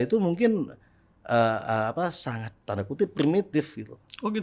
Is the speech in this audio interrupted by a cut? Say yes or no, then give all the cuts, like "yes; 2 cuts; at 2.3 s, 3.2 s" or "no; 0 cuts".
no; 0 cuts